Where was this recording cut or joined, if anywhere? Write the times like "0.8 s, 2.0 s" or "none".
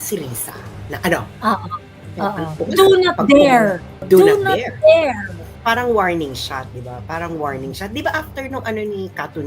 2.5 s, 4.0 s, 5.5 s